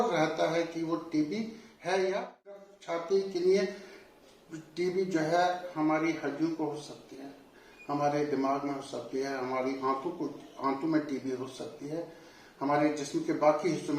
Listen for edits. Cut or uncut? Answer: cut